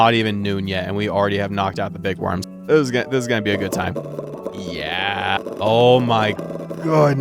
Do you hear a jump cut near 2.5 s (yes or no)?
yes